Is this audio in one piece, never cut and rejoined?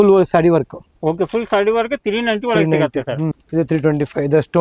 no; 1 cut; at 3.4 s

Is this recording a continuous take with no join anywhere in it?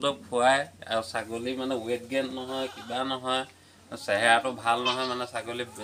yes; 0 cuts

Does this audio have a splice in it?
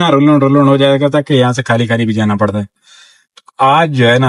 no; 0 cuts

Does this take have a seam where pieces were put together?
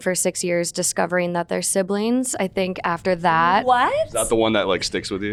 no; 0 cuts

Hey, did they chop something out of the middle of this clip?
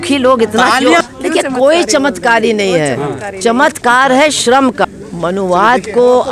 yes; 2 cuts; at 1.0 s, 4.8 s

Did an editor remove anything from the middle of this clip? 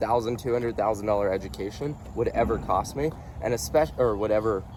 no; 0 cuts

